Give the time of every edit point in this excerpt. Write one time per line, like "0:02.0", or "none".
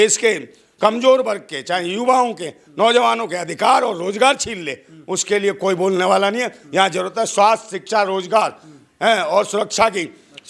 none